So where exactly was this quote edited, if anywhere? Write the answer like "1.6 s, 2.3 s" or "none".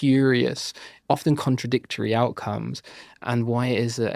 0.9 s, 3.2 s